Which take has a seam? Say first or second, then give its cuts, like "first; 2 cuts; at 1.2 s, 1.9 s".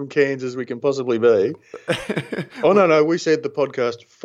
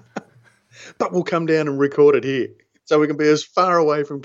second; 1 cut; at 2.8 s